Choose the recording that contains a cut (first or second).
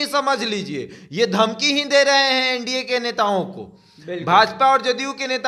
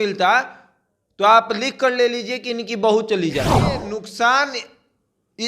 second